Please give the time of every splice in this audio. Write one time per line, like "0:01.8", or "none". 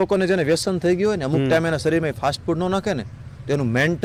none